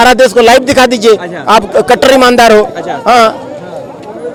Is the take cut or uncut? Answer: uncut